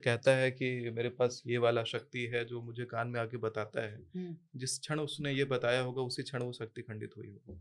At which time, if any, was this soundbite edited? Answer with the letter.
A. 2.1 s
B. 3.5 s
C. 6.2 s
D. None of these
D